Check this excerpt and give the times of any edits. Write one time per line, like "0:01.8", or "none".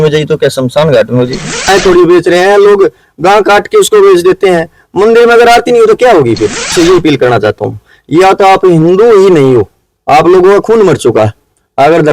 0:01.7
0:06.7